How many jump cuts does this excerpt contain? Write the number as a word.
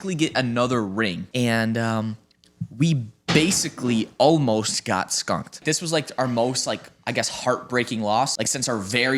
three